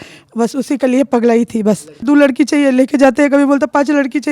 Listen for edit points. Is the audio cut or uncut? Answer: cut